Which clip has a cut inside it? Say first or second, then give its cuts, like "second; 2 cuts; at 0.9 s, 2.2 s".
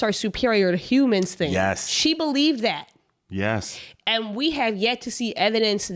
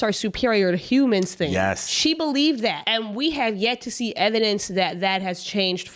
second; 1 cut; at 2.8 s